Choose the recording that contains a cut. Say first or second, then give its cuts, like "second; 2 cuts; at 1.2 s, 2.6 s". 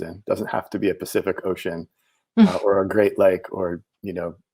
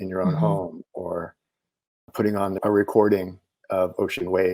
second; 1 cut; at 2.6 s